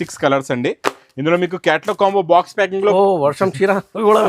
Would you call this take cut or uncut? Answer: cut